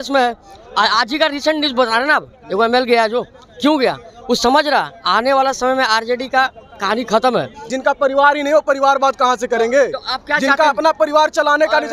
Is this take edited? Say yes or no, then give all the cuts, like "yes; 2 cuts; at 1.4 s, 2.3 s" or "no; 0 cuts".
yes; 1 cut; at 7.6 s